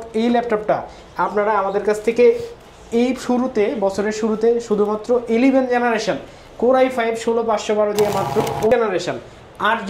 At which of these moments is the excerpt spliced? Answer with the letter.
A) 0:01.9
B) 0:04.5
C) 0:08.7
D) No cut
C